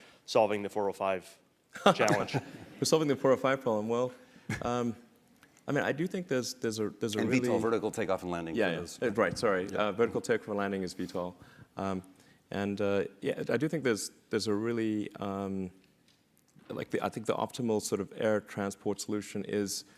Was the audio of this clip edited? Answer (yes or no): yes